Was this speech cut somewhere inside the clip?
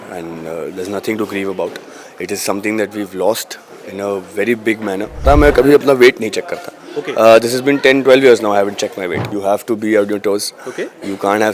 yes; 2 cuts; at 5.2 s, 9.3 s

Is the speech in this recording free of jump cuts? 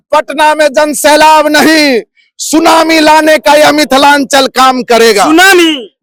yes; 0 cuts

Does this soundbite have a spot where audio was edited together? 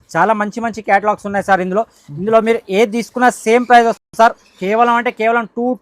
no; 0 cuts

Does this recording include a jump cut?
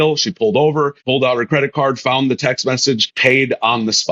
yes; 2 cuts; at 1.0 s, 3.1 s

